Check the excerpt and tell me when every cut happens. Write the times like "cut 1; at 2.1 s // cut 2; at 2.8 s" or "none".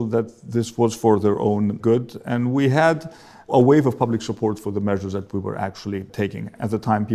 cut 1; at 1.8 s // cut 2; at 3.5 s // cut 3; at 6.3 s